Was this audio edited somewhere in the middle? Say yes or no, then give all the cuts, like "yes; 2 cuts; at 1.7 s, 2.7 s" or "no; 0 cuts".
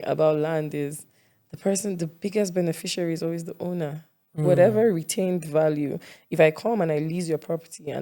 no; 0 cuts